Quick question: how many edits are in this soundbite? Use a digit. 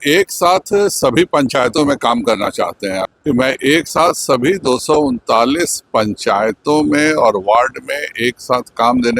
1